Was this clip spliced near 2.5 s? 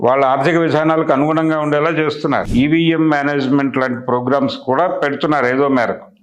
yes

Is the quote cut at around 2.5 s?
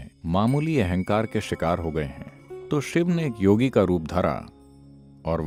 no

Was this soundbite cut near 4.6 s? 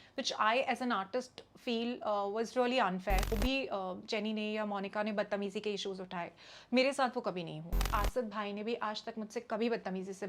no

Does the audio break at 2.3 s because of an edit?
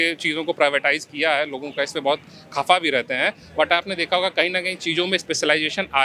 no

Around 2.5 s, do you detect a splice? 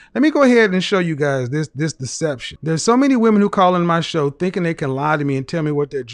yes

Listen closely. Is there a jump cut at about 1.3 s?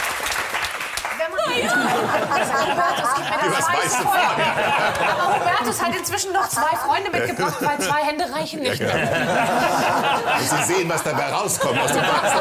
no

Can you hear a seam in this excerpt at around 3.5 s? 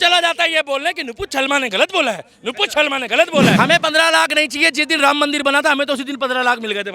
yes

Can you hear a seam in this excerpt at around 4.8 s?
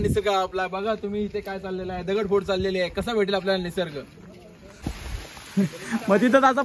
yes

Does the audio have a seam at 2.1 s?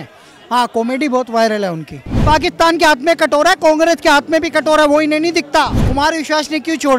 yes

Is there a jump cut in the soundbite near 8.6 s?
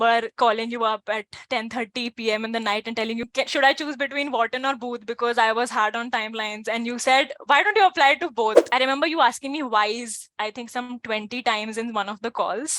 yes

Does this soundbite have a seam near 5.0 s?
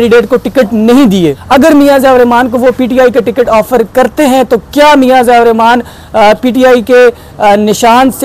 no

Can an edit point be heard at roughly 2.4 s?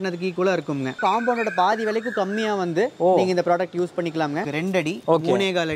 no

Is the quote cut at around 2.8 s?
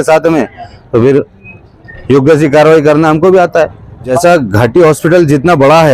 no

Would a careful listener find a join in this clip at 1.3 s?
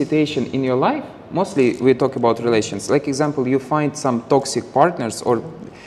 no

